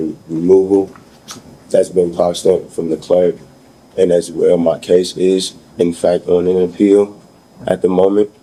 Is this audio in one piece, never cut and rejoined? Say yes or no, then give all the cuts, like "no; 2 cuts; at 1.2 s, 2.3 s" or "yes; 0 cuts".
yes; 0 cuts